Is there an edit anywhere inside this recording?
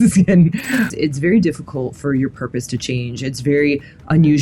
yes; 1 cut; at 0.9 s

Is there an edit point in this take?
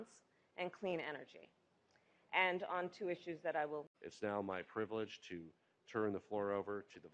yes; 1 cut; at 4.0 s

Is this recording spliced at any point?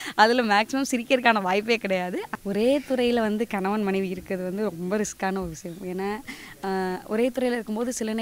yes; 1 cut; at 2.3 s

